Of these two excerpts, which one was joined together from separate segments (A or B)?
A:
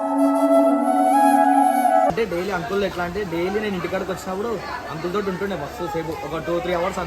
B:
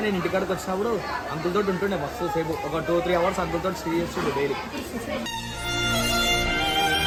A